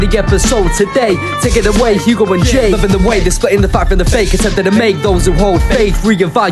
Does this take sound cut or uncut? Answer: cut